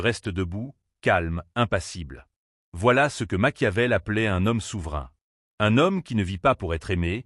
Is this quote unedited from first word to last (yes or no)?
no